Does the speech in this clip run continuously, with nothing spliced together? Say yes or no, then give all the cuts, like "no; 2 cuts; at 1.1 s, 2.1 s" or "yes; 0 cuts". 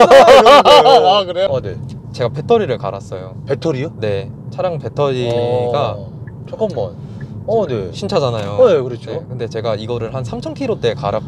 no; 1 cut; at 1.6 s